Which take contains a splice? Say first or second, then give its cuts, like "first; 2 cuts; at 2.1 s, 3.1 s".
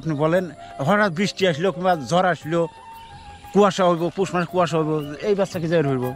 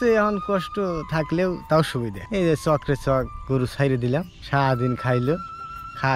second; 2 cuts; at 2.2 s, 4.4 s